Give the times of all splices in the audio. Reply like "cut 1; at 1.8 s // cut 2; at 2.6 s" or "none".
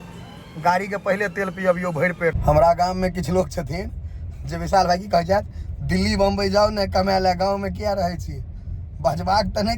cut 1; at 2.4 s